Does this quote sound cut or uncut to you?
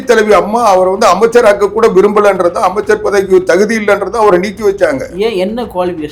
uncut